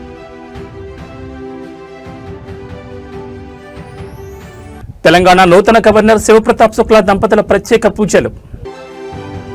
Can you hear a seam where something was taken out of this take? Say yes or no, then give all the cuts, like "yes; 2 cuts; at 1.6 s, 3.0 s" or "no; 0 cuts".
yes; 1 cut; at 4.3 s